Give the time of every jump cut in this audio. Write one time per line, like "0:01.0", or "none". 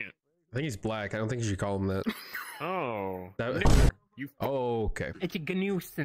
0:05.1

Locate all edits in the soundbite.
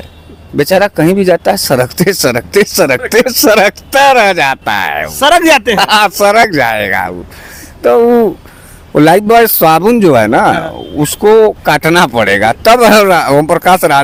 none

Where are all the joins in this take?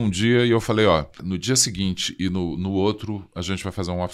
0:01.2

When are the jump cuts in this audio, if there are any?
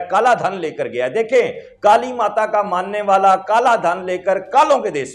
none

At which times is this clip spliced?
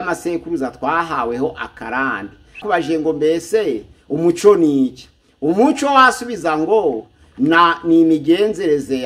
0:02.6

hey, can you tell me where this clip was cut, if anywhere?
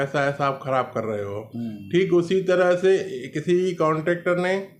none

